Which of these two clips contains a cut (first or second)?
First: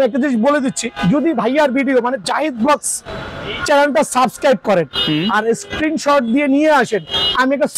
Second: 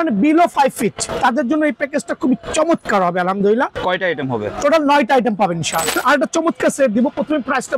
second